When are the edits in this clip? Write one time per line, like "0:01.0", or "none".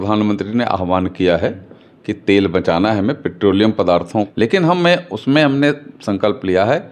0:04.3